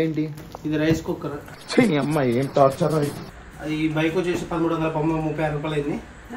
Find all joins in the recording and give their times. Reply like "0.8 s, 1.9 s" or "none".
3.3 s